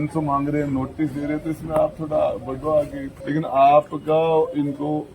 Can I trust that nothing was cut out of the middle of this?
no; 1 cut; at 3.1 s

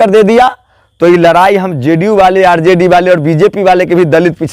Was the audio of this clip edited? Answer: no; 0 cuts

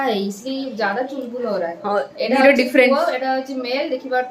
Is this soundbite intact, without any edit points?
yes; 0 cuts

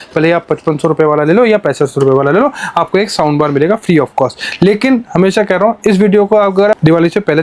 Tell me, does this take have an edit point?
no; 0 cuts

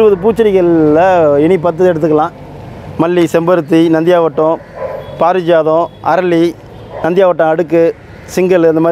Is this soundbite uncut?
yes; 0 cuts

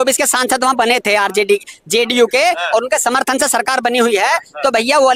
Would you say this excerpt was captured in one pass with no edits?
yes; 0 cuts

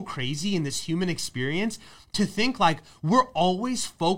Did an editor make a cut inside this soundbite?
no; 0 cuts

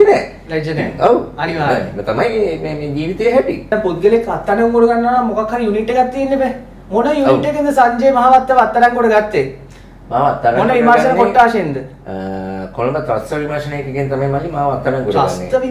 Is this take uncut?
yes; 0 cuts

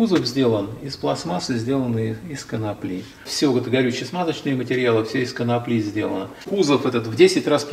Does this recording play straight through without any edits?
no; 2 cuts; at 3.2 s, 6.3 s

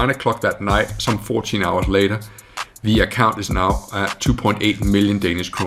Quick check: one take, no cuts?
yes; 0 cuts

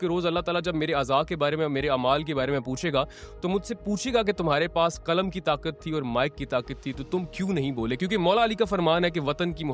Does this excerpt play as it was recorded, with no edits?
yes; 0 cuts

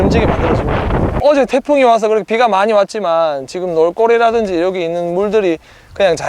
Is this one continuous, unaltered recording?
no; 1 cut; at 1.2 s

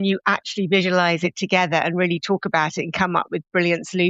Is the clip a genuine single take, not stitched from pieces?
yes; 0 cuts

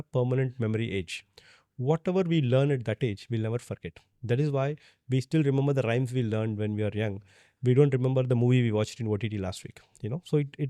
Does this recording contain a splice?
no; 0 cuts

